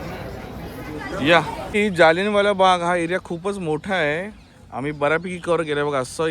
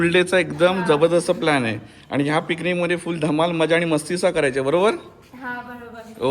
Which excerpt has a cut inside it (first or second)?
first